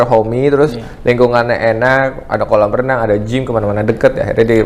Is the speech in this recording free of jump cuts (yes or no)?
yes